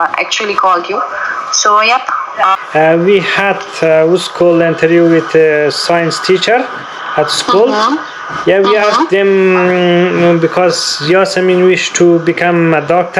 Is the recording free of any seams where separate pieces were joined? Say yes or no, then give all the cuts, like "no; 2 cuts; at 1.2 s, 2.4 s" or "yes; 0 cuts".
no; 1 cut; at 2.6 s